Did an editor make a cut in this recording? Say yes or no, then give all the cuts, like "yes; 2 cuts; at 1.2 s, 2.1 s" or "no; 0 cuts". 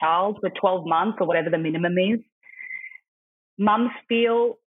no; 0 cuts